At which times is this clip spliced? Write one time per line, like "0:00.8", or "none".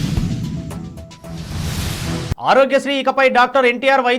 0:02.3